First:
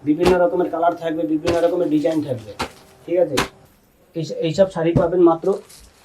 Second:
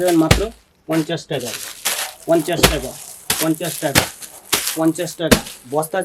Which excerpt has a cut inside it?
first; 1 cut; at 3.6 s

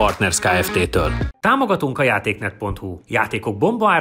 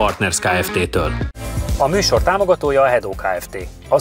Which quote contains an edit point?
first; 1 cut; at 1.2 s

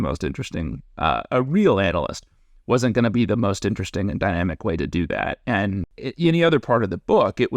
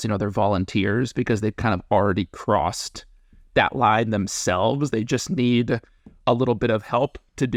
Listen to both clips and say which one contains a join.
first; 1 cut; at 6.0 s

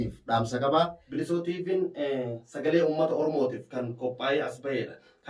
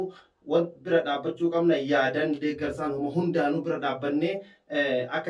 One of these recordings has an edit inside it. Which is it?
first; 1 cut; at 1.0 s

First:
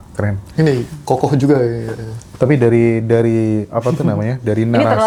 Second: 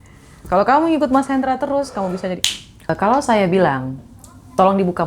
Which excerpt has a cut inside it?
second; 1 cut; at 2.9 s

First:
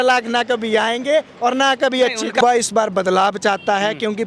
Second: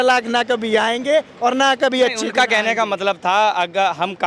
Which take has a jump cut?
first; 1 cut; at 2.4 s

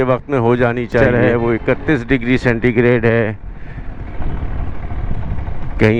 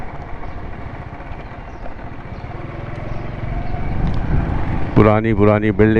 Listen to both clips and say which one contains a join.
first; 1 cut; at 1.0 s

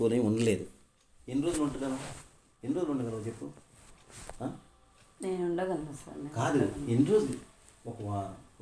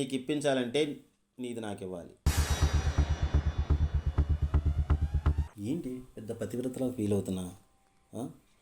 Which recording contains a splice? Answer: second; 1 cut; at 5.5 s

